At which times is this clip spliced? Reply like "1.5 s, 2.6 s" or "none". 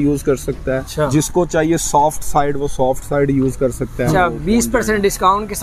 0.9 s, 4.1 s